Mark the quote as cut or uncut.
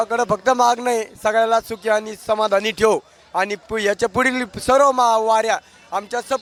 uncut